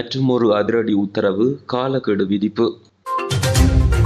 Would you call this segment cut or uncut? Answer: cut